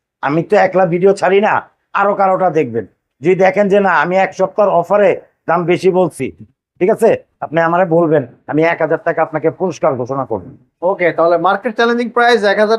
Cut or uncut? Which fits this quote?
uncut